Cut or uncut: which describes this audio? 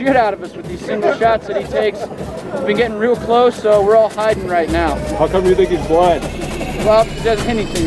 uncut